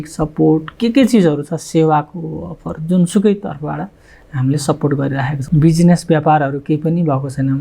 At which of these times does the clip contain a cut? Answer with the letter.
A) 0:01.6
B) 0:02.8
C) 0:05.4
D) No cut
C